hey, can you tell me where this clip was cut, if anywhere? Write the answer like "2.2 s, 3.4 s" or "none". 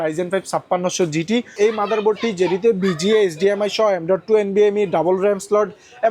1.5 s